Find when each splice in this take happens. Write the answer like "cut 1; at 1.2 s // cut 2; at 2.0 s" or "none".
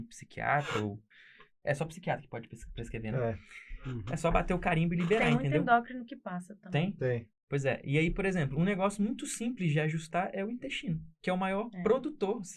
none